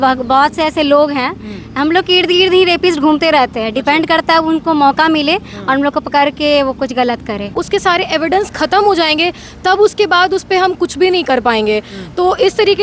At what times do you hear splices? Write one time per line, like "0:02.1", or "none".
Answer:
0:07.5